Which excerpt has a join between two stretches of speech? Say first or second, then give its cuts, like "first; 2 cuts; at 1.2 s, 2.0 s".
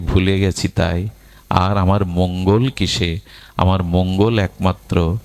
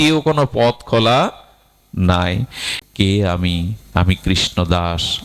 second; 1 cut; at 2.7 s